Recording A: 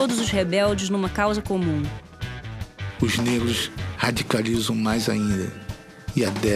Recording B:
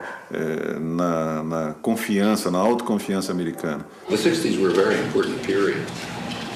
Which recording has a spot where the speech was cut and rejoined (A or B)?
B